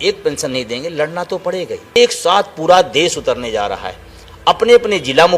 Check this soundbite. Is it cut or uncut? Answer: cut